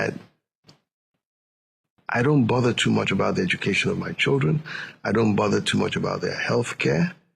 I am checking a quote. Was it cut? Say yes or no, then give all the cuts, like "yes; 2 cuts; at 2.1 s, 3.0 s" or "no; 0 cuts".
no; 0 cuts